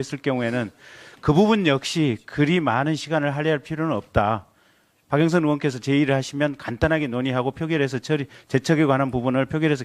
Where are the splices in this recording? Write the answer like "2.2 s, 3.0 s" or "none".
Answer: 4.1 s